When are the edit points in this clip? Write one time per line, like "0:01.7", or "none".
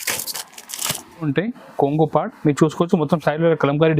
0:01.3